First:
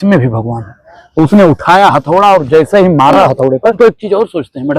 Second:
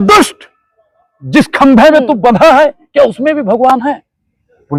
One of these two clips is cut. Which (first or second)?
first